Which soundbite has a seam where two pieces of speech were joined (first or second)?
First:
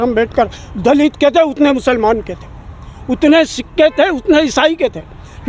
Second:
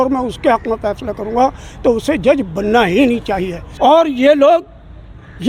second